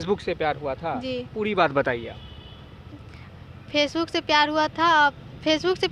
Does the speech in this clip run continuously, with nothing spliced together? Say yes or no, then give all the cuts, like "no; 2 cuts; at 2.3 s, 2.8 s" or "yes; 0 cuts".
yes; 0 cuts